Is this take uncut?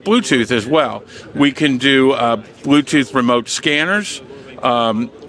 yes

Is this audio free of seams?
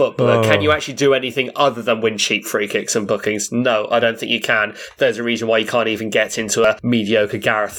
no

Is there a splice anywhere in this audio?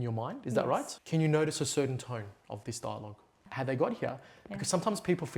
yes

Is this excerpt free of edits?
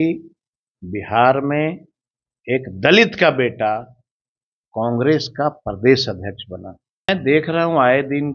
no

